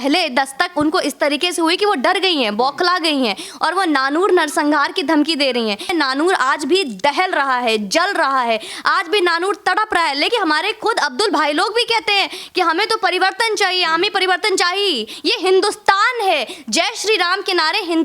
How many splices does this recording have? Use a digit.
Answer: 3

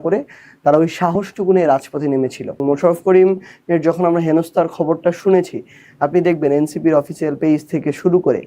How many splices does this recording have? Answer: 1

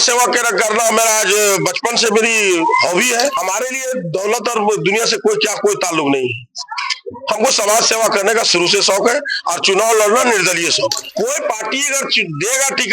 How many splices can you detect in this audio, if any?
2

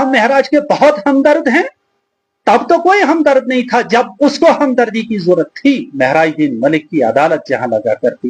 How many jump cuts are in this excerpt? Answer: 1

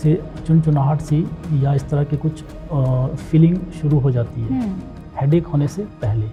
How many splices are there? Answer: 0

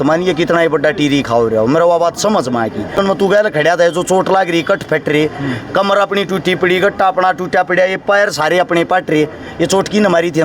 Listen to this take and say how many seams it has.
1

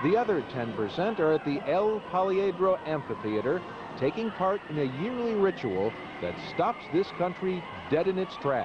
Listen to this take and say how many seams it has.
1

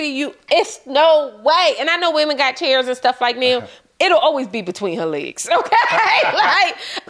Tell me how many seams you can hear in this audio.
0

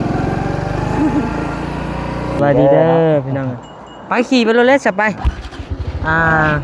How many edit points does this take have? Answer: 1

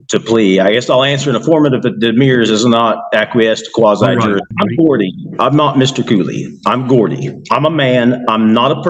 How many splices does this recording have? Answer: 1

